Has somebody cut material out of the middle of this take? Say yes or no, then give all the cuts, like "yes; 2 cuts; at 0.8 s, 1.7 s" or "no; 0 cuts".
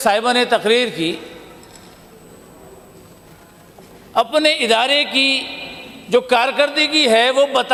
no; 0 cuts